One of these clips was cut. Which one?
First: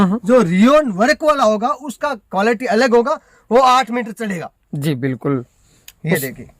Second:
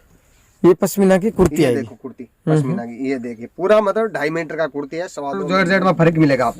second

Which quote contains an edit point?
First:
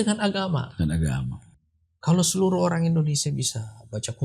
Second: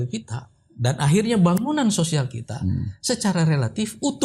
first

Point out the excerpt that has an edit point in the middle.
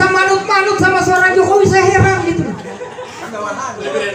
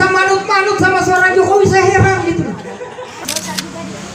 second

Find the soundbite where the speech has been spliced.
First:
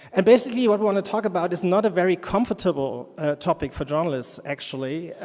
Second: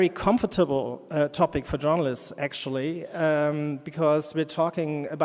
first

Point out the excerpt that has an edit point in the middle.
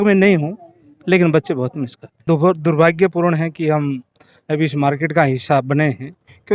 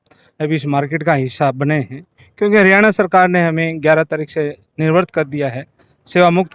first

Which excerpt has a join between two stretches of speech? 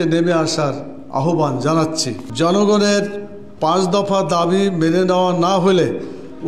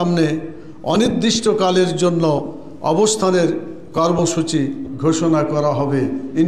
first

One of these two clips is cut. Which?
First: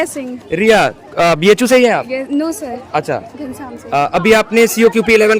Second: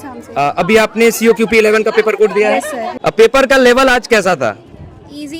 second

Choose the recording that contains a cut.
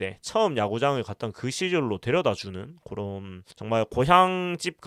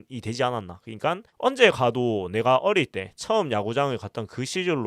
second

